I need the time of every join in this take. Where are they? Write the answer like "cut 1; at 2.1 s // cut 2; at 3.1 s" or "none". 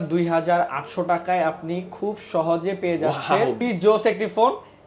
cut 1; at 3.6 s